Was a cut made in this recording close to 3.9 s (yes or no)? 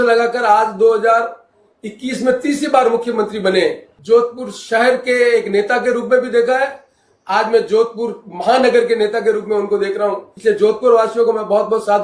yes